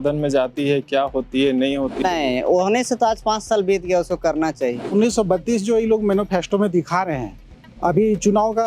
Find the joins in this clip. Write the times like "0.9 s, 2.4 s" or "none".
2.0 s, 4.9 s